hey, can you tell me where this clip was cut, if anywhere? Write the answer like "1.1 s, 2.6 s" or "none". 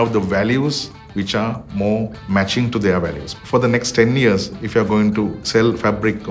2.2 s, 3.2 s

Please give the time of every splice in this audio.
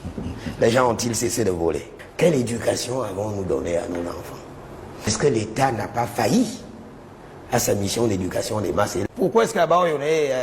2.0 s, 9.0 s

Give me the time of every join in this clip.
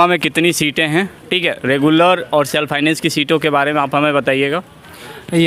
none

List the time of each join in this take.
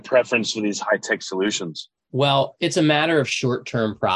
2.5 s

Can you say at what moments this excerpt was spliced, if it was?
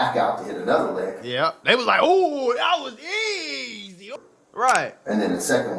4.1 s

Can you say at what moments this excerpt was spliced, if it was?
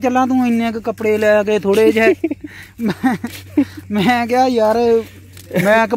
none

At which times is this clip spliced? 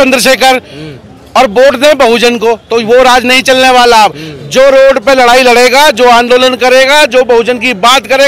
none

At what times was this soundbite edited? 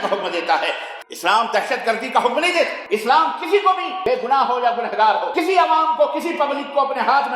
0.9 s, 2.8 s, 3.9 s, 5.3 s

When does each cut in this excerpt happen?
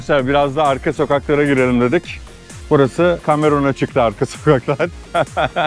none

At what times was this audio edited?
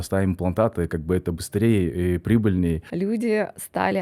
2.9 s

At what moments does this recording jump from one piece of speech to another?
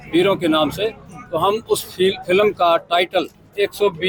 none

